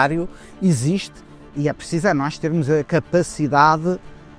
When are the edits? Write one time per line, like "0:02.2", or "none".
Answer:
none